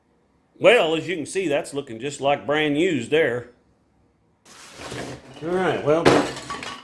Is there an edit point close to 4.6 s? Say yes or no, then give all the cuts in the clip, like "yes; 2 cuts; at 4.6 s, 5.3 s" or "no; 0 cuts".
yes; 1 cut; at 4.6 s